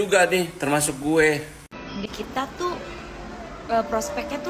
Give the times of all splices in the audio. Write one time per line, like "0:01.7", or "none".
0:01.6

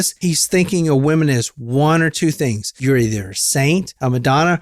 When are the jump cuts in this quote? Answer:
none

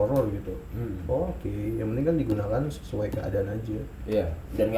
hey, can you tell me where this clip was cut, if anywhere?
none

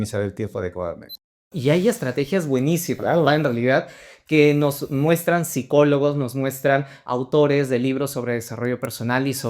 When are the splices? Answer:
0:01.4

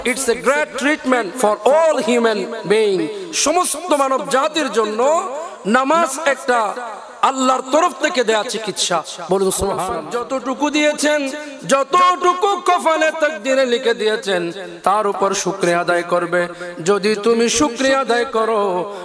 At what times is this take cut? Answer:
0:01.3
0:10.1

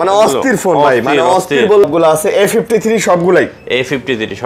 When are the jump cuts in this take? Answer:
0:01.8

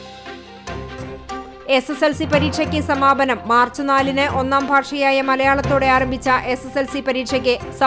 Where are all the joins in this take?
0:01.5

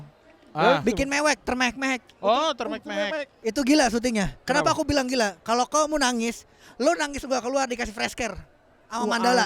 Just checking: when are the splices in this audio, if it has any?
0:03.3

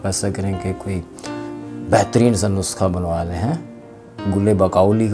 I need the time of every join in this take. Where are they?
none

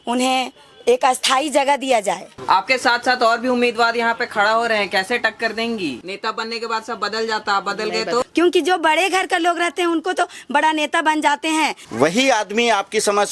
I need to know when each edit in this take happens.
0:02.3
0:06.1
0:08.3
0:11.8

